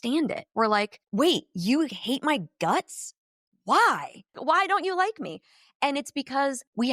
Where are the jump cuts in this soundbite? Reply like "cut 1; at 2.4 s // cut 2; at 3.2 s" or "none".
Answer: cut 1; at 1.0 s // cut 2; at 4.4 s